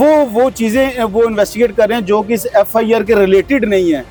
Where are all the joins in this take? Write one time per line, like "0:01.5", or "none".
none